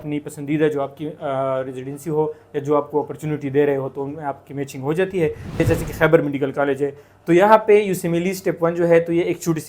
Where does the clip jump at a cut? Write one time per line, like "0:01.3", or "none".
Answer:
0:05.6

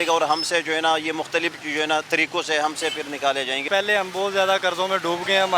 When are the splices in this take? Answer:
0:03.7

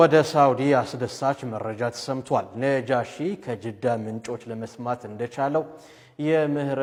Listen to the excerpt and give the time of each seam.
none

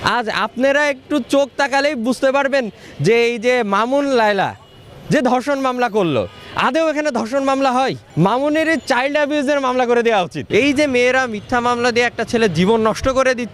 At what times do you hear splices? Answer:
0:08.0
0:10.4

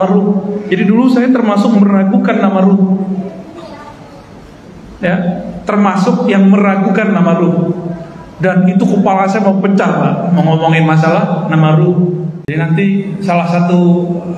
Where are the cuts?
0:12.4

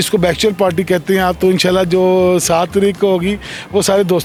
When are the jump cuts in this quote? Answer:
none

